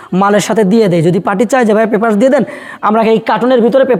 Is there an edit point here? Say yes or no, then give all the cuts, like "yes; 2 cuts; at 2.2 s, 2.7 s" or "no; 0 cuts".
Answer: no; 0 cuts